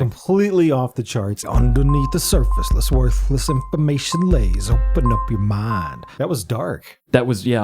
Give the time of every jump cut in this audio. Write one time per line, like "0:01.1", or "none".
0:01.4
0:06.0